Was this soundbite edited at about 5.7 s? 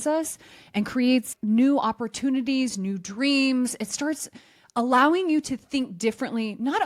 no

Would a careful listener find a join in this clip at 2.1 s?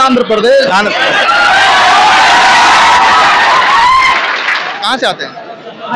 no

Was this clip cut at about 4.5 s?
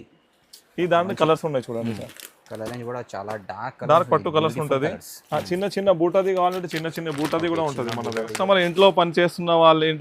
no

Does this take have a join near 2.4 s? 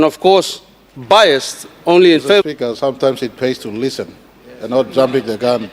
yes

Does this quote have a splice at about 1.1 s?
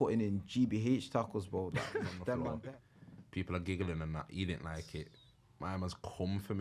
no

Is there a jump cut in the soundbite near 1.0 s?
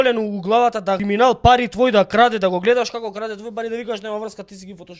yes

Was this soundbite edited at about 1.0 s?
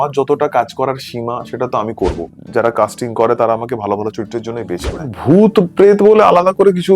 no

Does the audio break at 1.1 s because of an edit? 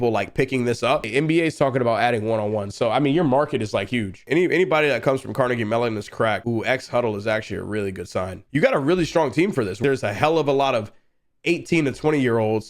yes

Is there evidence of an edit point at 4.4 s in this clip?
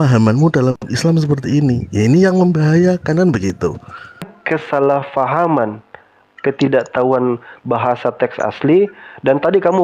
yes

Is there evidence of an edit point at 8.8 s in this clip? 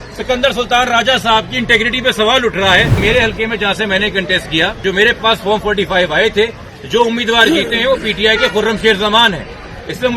no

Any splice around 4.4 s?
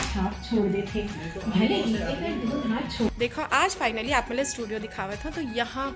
no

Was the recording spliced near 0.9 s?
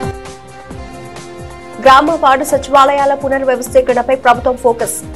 yes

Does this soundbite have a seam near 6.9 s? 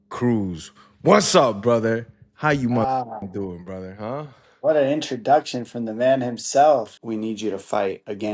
yes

